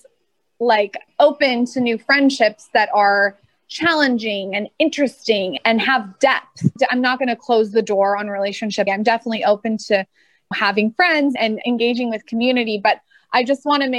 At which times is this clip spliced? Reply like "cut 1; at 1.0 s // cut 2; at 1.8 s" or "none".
cut 1; at 8.9 s // cut 2; at 11.6 s